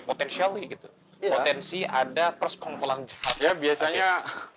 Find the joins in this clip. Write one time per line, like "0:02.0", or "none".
0:03.3